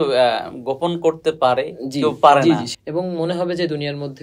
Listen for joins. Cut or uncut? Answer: cut